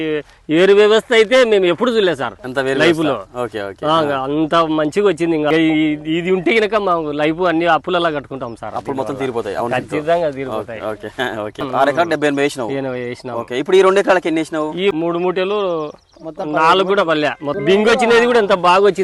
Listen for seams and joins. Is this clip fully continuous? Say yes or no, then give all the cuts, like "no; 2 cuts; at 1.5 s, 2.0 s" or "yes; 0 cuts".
no; 4 cuts; at 5.5 s, 11.7 s, 14.9 s, 17.5 s